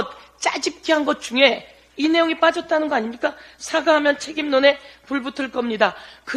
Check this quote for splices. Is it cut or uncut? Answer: uncut